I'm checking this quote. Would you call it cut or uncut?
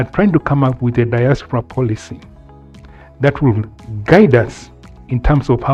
uncut